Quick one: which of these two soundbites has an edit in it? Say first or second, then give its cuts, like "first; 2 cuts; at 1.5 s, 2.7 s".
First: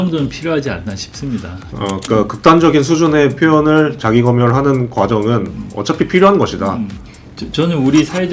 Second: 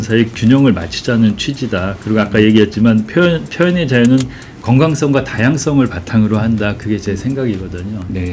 first; 1 cut; at 2.0 s